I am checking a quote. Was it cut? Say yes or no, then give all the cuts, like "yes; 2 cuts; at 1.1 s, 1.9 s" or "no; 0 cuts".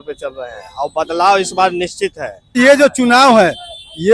yes; 1 cut; at 2.6 s